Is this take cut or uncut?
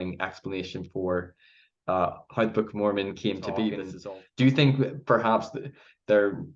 cut